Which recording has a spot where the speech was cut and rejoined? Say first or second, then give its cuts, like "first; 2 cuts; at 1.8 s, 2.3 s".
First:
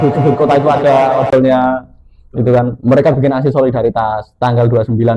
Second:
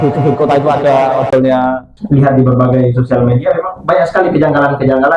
second; 1 cut; at 1.9 s